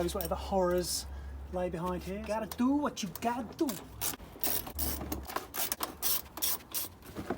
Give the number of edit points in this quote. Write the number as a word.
two